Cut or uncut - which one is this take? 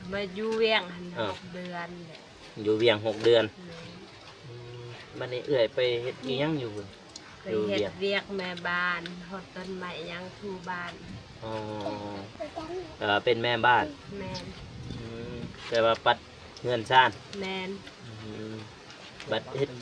uncut